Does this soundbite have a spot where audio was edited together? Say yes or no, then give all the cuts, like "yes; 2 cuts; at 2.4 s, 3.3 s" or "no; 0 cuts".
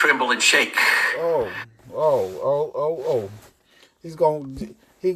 no; 0 cuts